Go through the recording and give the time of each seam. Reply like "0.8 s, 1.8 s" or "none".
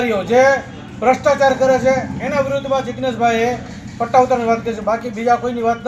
none